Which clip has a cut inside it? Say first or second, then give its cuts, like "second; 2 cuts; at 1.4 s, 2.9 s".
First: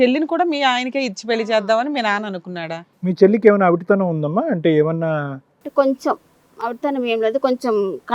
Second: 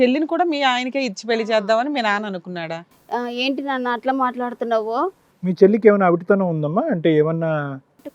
first; 1 cut; at 2.9 s